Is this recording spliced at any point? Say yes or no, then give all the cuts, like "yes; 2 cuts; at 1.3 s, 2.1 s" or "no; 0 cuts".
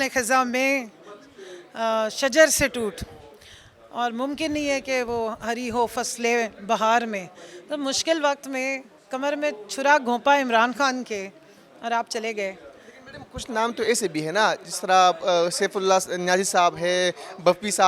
no; 0 cuts